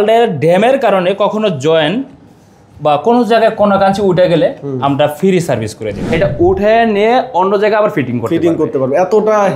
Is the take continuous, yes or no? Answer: no